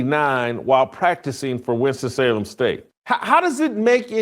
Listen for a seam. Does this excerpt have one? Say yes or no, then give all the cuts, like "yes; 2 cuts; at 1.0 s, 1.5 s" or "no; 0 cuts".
yes; 1 cut; at 2.9 s